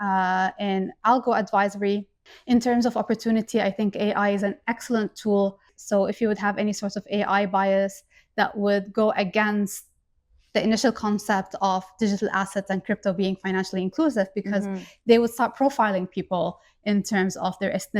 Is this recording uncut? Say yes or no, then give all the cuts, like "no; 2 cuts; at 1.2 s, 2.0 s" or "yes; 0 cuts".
no; 2 cuts; at 2.3 s, 5.7 s